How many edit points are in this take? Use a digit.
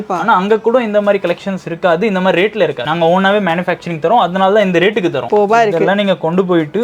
2